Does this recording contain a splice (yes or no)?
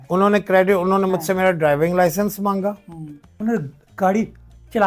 yes